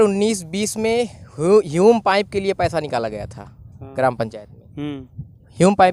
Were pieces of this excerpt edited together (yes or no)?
no